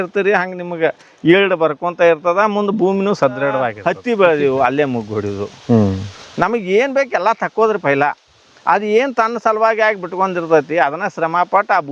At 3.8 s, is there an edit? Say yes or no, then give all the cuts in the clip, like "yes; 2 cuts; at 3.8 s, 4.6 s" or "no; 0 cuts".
yes; 1 cut; at 3.8 s